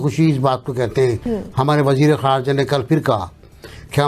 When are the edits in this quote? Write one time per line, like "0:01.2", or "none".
0:01.2